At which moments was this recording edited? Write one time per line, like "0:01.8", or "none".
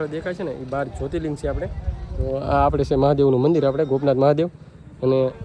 none